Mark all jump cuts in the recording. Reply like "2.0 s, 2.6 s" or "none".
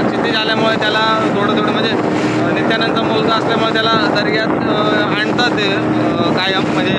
none